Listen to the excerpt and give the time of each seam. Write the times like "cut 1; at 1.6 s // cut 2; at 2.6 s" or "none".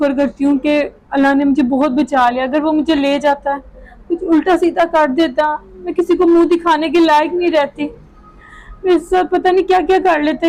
none